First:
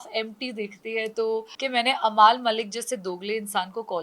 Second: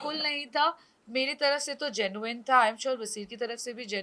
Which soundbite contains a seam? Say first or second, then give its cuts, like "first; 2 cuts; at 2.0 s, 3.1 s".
first; 1 cut; at 1.6 s